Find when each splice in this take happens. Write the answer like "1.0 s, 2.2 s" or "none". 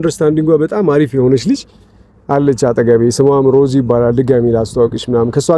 none